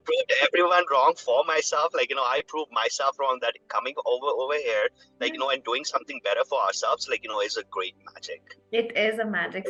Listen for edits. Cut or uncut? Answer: uncut